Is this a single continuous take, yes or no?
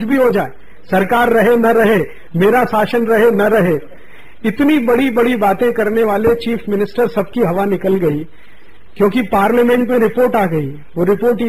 no